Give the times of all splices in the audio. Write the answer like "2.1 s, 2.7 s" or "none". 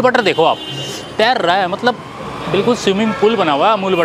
none